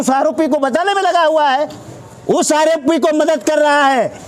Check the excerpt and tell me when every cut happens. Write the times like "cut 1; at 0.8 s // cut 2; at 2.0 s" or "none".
none